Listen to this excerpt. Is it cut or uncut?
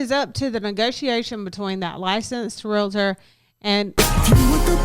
cut